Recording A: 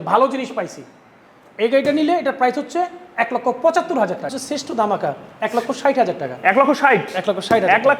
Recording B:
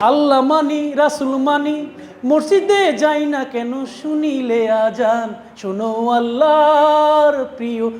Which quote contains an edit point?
A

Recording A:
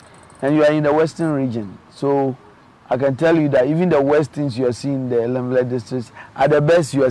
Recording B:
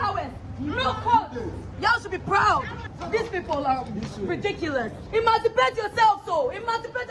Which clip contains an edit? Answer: B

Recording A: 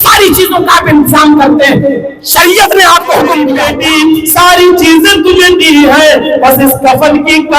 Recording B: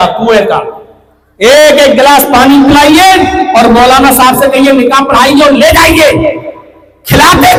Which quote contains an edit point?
A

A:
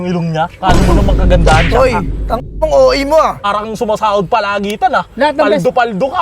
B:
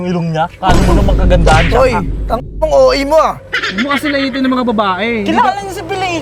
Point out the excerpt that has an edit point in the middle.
A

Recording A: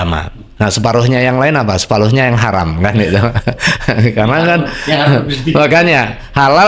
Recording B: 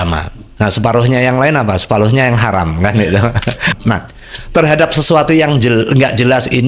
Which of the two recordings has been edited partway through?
B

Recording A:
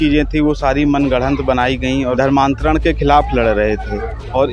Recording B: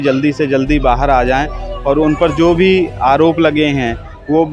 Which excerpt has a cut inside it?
A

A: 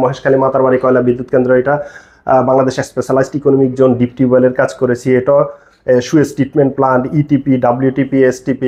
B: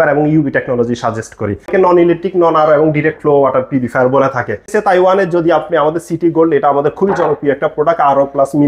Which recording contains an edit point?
B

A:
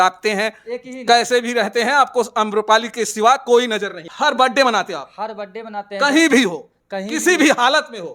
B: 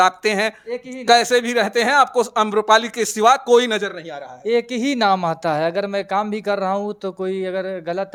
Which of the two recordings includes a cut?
A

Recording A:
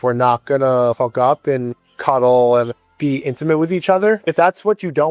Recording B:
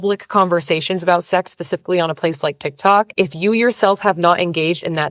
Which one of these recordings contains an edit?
A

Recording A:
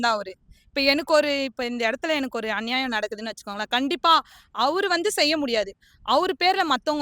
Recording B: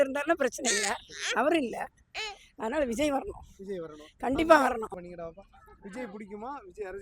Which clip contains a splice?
B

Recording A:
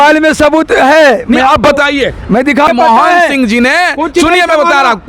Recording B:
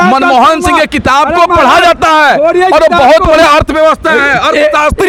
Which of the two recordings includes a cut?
A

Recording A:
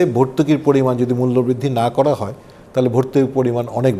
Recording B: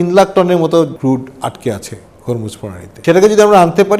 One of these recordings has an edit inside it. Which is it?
B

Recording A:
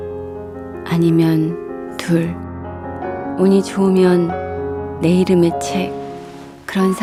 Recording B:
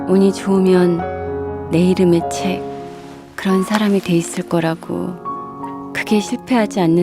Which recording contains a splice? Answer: B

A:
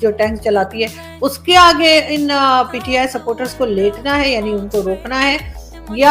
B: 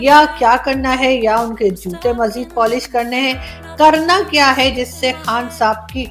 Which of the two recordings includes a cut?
B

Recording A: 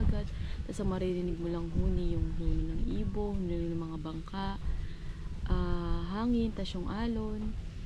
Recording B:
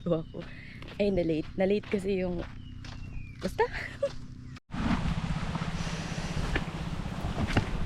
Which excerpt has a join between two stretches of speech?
B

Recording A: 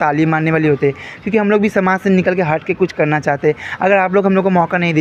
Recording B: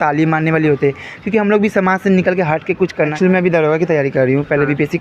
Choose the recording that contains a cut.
B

